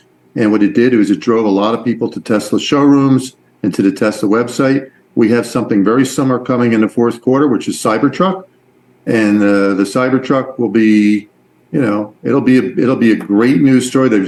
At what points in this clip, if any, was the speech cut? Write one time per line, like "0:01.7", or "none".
none